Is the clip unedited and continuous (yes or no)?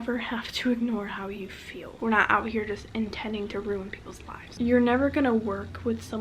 no